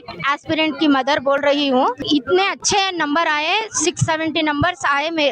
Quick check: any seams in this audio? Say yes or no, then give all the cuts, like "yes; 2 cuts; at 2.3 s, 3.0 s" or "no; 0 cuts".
yes; 1 cut; at 2.0 s